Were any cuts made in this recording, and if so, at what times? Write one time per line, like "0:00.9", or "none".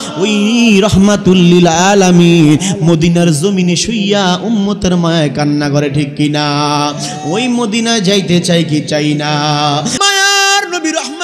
0:10.0